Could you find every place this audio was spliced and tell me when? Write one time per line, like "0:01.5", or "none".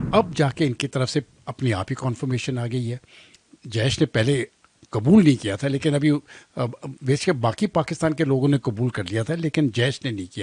none

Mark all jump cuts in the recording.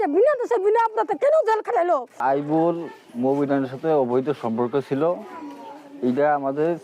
0:02.1

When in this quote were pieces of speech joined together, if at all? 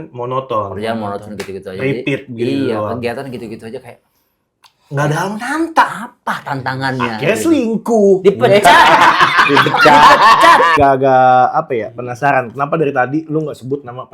0:10.7

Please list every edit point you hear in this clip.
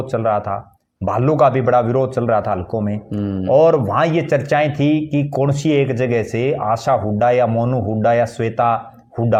none

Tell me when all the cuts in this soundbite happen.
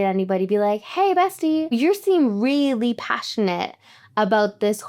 0:01.7

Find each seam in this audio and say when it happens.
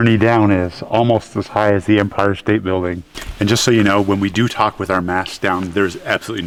none

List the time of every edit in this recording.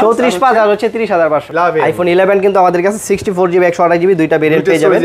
0:01.5

